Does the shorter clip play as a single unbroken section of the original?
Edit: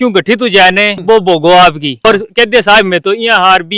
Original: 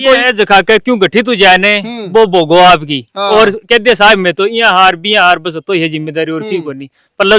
no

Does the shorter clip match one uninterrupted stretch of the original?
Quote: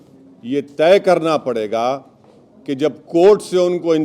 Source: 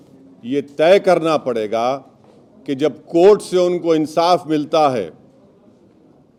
yes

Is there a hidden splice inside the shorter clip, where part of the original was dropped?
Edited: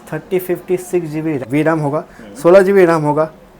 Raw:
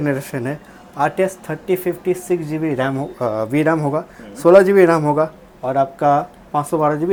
yes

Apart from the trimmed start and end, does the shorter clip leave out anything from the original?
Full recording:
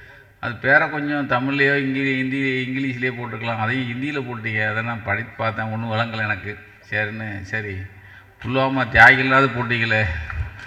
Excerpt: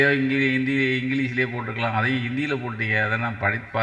no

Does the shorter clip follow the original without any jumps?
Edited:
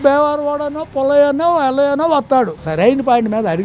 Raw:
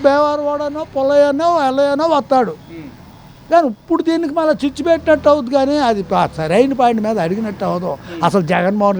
no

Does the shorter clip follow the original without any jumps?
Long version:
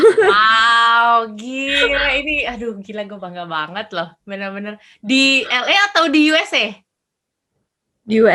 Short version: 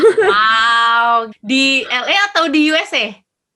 no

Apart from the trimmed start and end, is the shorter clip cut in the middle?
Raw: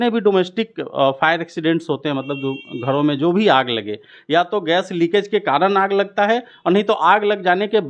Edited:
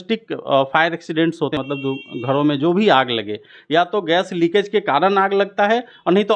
yes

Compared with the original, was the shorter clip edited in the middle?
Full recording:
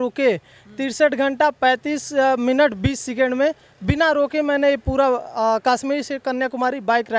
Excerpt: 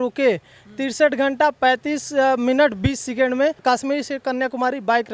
yes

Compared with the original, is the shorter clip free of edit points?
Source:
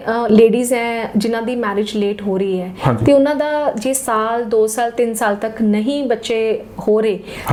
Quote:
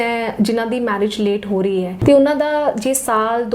no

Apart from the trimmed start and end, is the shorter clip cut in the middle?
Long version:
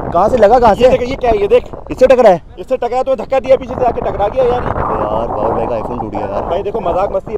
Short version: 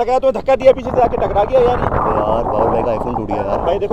no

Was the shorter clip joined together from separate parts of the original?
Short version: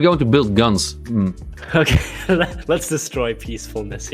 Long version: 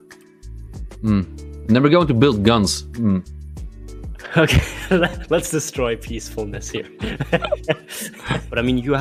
yes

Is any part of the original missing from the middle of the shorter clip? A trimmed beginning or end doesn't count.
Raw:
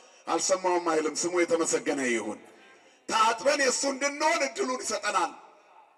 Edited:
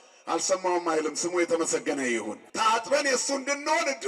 yes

